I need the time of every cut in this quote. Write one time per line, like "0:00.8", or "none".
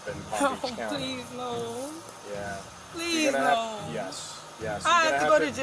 none